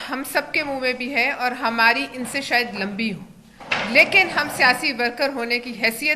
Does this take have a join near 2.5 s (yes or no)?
no